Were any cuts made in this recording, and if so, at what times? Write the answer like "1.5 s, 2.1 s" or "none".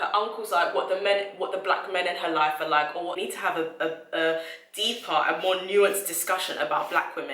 3.2 s